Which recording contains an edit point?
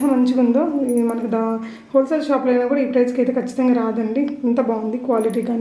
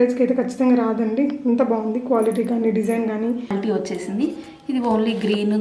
second; 1 cut; at 3.5 s

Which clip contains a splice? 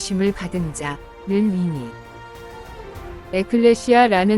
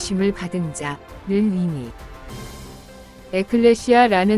first; 2 cuts; at 1.9 s, 3.3 s

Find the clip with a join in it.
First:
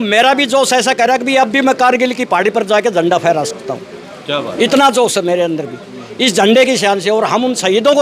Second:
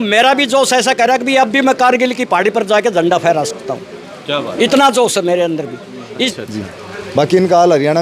second; 1 cut; at 6.3 s

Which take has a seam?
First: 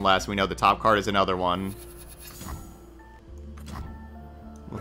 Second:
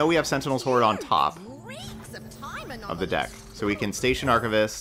first; 1 cut; at 3.2 s

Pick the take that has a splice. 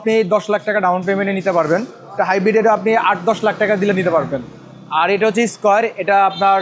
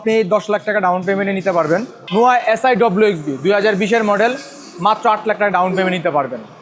second; 1 cut; at 2.0 s

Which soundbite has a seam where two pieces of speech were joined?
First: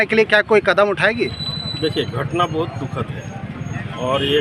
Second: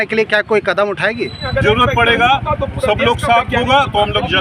second; 1 cut; at 1.4 s

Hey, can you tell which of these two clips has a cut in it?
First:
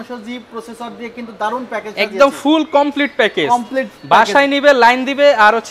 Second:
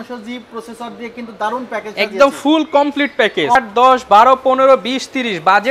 second; 1 cut; at 3.6 s

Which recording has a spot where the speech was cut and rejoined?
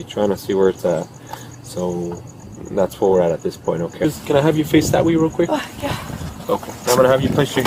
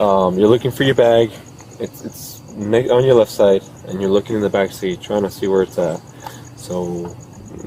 first; 1 cut; at 4.1 s

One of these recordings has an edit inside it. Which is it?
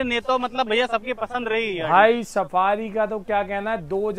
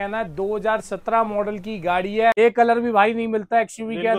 second; 1 cut; at 2.3 s

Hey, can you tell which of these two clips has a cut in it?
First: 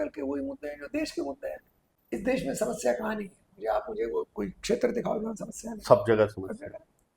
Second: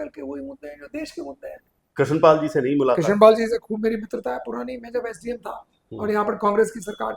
second; 1 cut; at 1.8 s

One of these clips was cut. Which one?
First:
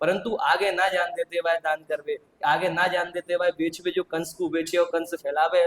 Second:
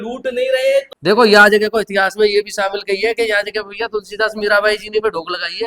second; 1 cut; at 0.9 s

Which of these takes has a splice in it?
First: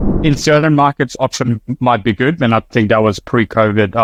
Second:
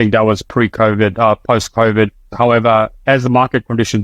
second; 1 cut; at 2.2 s

